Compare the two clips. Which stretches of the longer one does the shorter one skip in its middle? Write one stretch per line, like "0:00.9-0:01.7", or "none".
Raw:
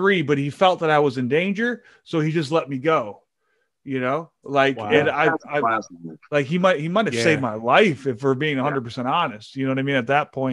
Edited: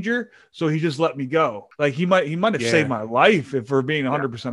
0:03.2-0:06.2